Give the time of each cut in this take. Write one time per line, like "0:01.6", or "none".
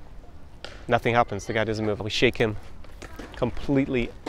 0:02.0